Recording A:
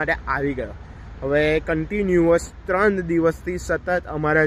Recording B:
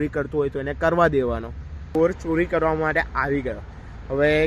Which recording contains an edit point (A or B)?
B